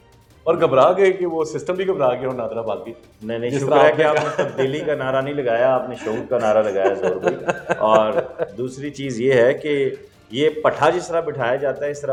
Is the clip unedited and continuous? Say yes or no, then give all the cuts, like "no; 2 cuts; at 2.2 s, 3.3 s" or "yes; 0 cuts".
yes; 0 cuts